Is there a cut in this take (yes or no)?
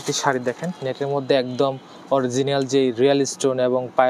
no